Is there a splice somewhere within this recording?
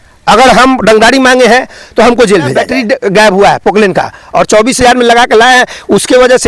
yes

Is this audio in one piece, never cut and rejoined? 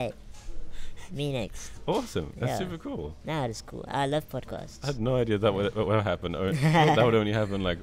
yes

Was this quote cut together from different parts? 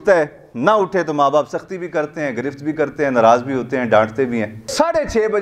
no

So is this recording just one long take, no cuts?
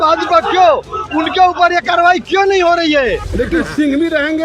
no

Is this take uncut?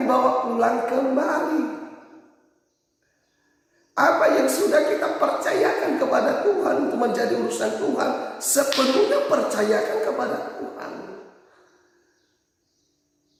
yes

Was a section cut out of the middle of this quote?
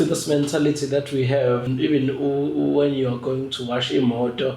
yes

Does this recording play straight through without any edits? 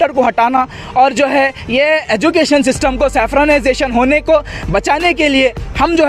yes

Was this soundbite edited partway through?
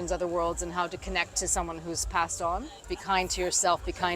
yes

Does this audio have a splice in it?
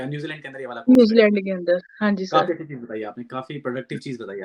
no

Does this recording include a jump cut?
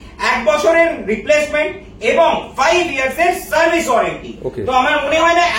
no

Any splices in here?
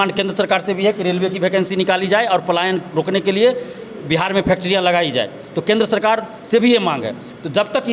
no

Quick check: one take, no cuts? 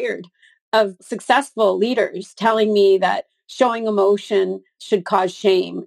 no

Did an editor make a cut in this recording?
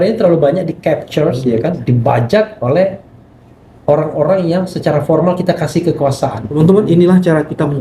yes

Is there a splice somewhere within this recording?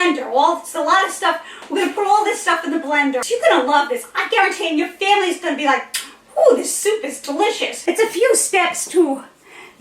yes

